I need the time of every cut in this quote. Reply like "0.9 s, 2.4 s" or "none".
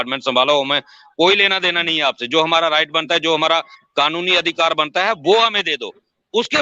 5.2 s